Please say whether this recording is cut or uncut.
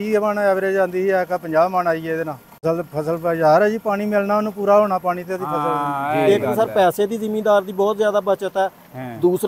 cut